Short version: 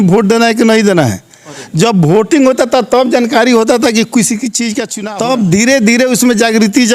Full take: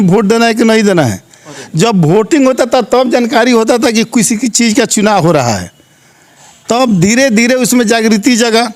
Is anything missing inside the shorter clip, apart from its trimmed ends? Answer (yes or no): yes